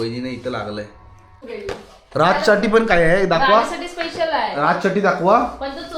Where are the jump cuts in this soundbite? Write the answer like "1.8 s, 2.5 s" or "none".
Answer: 1.4 s